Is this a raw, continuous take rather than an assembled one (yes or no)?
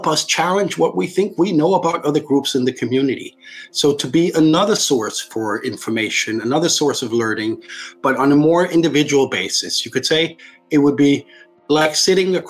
yes